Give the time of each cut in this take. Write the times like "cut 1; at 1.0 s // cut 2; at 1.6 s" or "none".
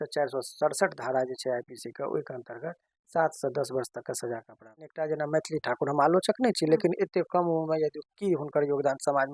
cut 1; at 4.9 s